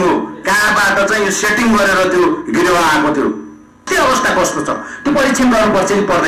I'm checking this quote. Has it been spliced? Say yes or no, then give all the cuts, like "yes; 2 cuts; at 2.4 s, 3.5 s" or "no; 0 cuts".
yes; 1 cut; at 3.9 s